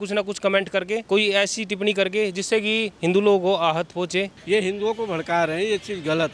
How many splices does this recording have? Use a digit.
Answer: 3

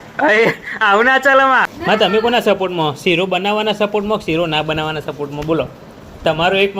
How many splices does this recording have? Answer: 1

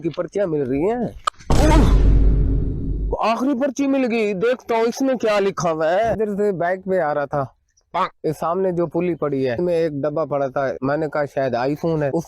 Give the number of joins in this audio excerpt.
2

